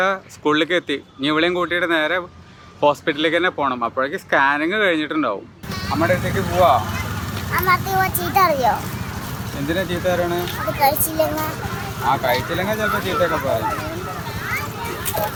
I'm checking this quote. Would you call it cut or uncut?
uncut